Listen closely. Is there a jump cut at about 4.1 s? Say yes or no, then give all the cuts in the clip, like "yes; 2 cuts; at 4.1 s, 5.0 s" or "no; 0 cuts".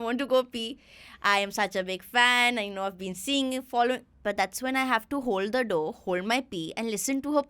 yes; 1 cut; at 4.1 s